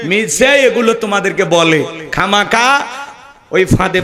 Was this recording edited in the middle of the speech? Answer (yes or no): no